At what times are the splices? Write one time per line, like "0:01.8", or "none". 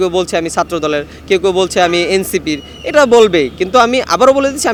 none